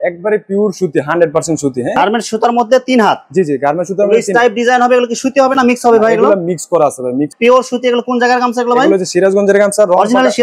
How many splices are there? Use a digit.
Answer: 2